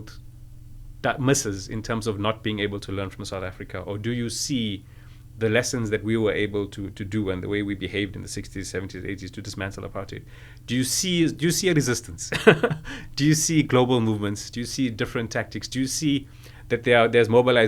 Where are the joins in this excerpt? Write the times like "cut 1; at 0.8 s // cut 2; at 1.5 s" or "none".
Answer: none

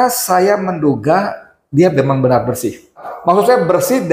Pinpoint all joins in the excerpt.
cut 1; at 3.1 s

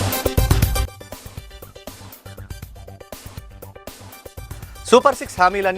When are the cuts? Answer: cut 1; at 0.9 s // cut 2; at 4.7 s

